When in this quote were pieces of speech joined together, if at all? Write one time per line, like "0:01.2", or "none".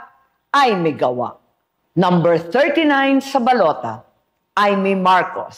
0:04.7